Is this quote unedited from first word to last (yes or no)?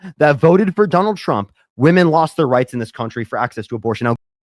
yes